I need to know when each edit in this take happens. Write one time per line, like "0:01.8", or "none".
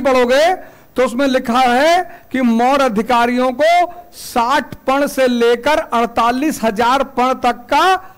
none